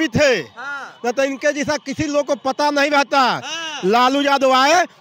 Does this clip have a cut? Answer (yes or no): no